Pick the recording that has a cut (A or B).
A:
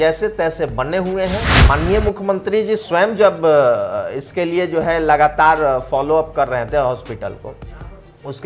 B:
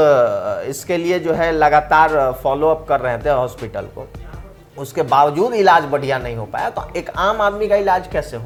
A